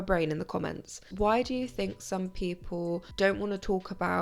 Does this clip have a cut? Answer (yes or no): yes